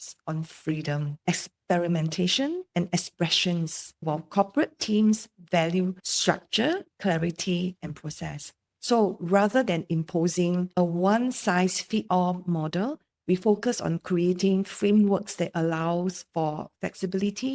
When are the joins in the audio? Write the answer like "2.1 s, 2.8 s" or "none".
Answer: none